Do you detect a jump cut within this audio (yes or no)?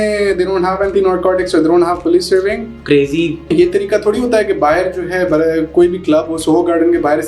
yes